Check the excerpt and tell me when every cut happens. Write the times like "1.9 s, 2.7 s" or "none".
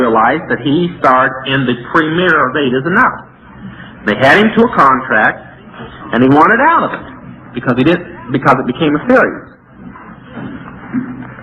7.0 s